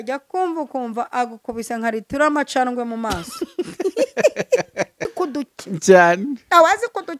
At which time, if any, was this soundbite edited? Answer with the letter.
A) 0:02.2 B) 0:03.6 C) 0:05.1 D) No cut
C